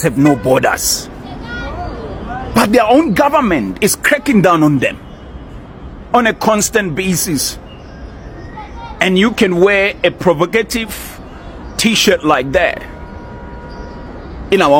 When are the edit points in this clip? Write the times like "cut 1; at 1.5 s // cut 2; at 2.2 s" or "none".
none